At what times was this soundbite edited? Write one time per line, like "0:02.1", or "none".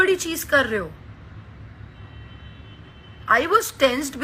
none